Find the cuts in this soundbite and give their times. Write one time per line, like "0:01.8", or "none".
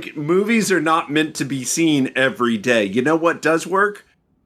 none